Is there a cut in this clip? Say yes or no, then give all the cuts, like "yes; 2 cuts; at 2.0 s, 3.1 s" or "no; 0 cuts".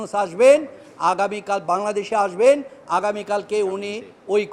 no; 0 cuts